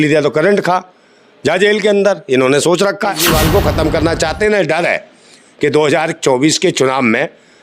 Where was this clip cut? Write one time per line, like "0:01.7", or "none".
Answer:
0:03.3